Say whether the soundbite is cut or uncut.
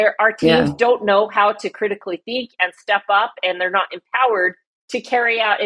uncut